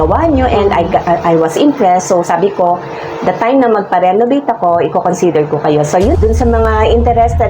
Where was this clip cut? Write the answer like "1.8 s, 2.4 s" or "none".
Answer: 6.1 s